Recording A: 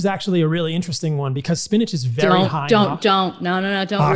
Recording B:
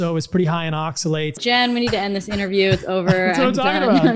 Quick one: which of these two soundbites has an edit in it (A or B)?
B